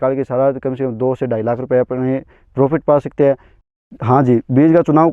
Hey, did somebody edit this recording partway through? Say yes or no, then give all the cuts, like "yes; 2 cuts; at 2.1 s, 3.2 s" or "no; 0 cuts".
yes; 1 cut; at 3.5 s